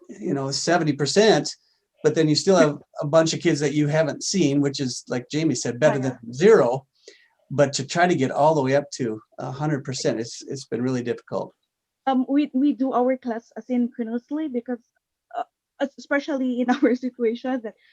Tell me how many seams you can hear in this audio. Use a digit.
0